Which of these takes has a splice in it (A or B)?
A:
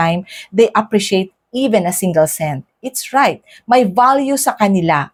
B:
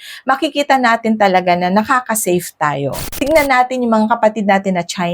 B